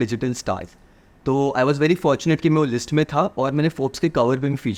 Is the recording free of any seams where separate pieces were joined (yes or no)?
yes